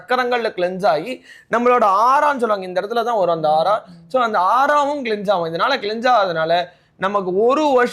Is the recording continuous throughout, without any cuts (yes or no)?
yes